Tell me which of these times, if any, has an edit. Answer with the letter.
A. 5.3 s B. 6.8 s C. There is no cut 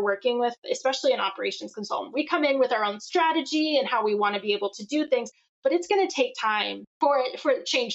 B